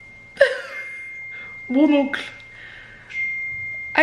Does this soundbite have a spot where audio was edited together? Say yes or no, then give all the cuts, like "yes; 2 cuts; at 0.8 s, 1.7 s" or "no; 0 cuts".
no; 0 cuts